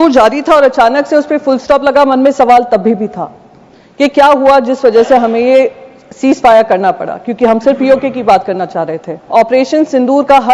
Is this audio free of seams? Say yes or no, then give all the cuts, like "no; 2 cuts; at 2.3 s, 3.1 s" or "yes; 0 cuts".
no; 1 cut; at 9.1 s